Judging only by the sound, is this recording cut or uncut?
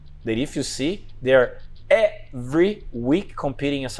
uncut